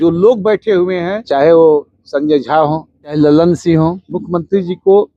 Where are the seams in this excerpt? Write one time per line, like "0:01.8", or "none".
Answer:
0:01.2
0:03.1
0:04.1